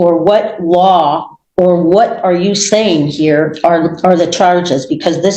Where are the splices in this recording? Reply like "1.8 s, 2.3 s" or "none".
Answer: none